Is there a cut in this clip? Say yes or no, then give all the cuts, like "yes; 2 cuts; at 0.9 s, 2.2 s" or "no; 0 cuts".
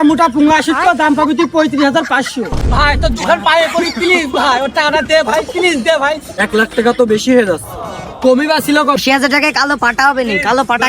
yes; 3 cuts; at 2.6 s, 6.3 s, 9.0 s